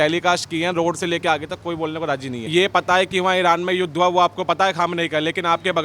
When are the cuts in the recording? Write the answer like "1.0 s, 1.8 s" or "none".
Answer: 2.5 s